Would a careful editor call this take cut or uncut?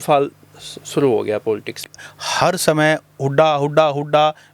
cut